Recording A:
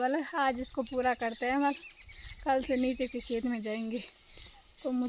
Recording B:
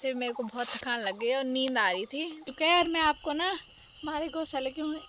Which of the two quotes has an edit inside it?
B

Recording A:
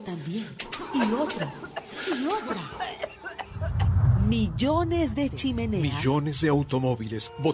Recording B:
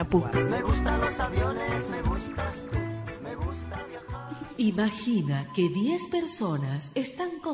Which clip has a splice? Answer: B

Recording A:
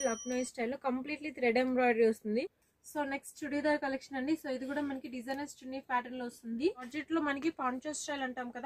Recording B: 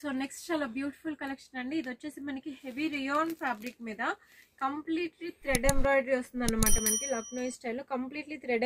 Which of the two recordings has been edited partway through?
A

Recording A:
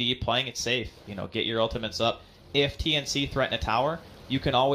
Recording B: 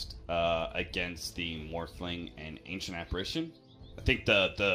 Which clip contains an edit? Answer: A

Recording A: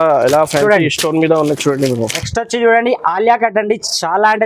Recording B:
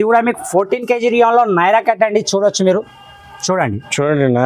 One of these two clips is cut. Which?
A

